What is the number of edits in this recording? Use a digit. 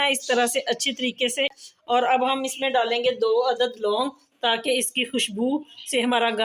1